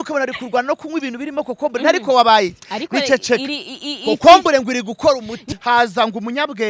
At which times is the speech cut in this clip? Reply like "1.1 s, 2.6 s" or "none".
5.5 s